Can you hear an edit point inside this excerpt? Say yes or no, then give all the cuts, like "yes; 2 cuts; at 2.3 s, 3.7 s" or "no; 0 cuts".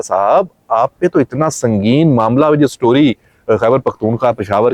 no; 0 cuts